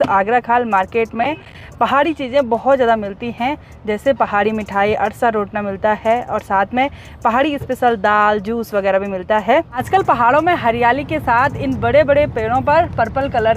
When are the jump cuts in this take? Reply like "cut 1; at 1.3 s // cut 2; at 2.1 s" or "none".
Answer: none